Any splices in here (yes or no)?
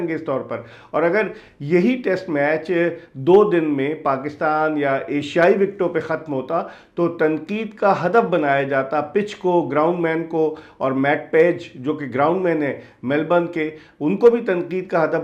no